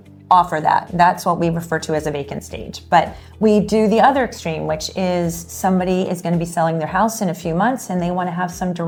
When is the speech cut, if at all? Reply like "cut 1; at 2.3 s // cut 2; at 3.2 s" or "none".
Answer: none